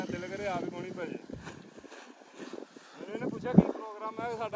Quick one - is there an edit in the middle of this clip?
no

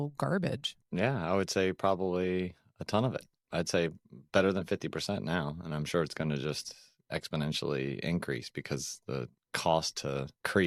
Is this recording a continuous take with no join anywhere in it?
yes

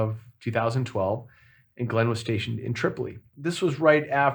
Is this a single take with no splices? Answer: no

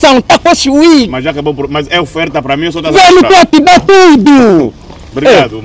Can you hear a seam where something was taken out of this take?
no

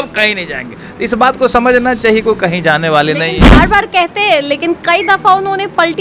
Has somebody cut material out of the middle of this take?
no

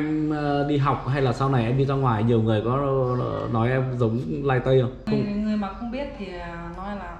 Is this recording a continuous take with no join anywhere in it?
no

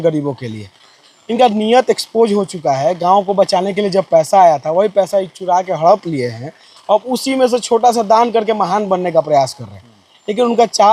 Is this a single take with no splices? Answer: yes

